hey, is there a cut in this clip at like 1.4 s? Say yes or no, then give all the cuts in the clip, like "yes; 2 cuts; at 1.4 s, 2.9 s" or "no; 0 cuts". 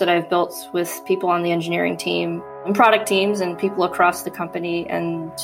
no; 1 cut; at 2.6 s